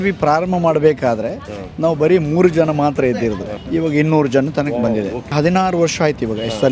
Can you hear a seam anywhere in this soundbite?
yes; 2 cuts; at 3.6 s, 5.3 s

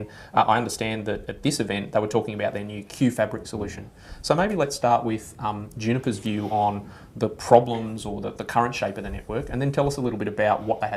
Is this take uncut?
no; 1 cut; at 5.5 s

